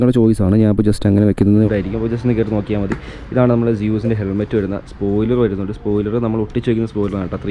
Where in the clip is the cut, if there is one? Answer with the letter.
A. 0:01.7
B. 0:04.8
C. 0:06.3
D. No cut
A